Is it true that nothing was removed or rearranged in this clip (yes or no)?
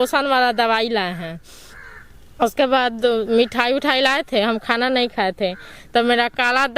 yes